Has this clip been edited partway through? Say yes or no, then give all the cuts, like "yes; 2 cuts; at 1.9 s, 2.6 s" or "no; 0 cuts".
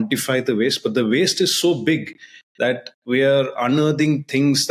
no; 0 cuts